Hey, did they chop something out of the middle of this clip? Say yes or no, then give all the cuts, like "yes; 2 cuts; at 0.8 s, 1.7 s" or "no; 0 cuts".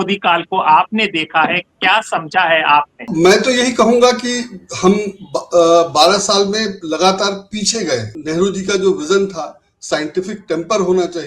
yes; 2 cuts; at 3.1 s, 8.1 s